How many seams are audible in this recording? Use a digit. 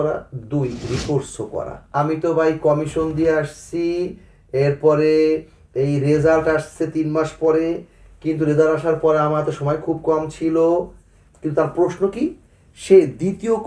1